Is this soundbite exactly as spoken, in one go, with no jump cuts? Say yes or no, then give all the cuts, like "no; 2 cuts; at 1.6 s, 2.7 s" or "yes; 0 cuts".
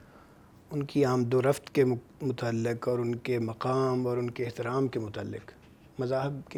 yes; 0 cuts